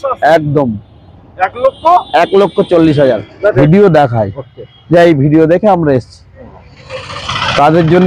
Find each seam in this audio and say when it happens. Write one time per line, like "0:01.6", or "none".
0:03.6